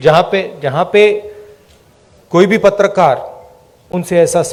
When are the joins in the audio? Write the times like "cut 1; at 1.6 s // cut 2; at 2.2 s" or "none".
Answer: none